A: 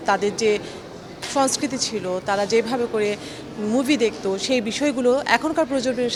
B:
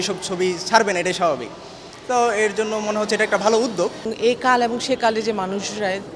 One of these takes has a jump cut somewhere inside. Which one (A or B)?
B